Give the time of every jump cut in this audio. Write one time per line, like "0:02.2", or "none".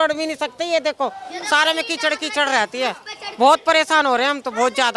none